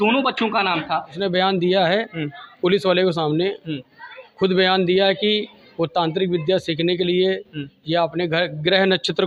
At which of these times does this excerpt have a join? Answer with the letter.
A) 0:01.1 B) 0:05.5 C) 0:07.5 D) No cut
A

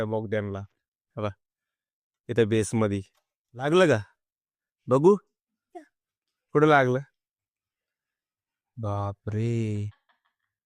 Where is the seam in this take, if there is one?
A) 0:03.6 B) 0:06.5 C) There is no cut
A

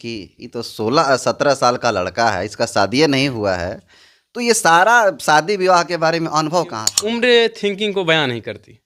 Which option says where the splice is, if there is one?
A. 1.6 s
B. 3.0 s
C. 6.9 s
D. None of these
C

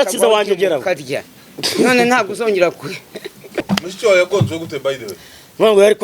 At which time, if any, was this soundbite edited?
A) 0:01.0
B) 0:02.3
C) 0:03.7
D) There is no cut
C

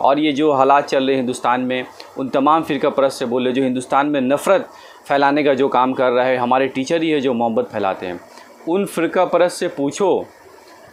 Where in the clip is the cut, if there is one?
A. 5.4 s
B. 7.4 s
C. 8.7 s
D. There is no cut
D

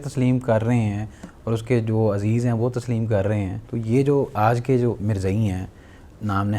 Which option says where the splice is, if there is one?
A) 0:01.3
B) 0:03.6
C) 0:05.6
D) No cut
B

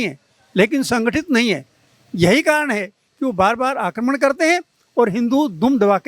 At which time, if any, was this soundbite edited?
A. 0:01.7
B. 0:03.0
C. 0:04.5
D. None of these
D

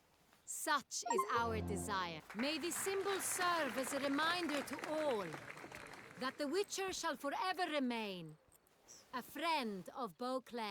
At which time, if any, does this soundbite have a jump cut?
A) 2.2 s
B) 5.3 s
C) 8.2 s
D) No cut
A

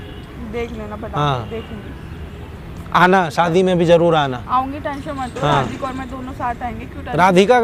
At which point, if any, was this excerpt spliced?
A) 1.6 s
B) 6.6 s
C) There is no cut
C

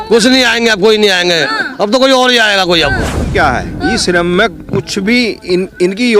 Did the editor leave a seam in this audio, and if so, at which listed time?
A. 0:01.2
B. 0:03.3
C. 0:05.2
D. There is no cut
B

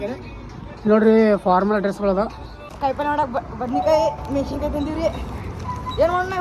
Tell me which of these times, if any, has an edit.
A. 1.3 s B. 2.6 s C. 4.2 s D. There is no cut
B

